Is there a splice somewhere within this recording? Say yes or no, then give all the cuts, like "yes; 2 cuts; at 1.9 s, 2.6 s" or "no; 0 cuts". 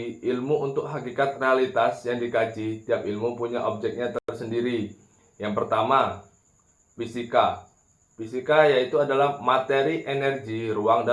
no; 0 cuts